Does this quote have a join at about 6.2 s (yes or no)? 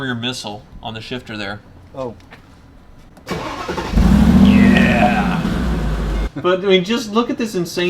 yes